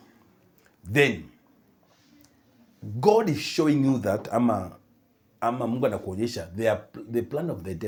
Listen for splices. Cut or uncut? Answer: uncut